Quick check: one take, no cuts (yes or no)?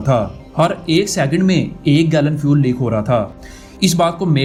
yes